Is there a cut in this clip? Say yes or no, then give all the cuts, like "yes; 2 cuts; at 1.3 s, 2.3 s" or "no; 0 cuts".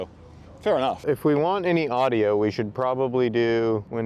yes; 1 cut; at 1.0 s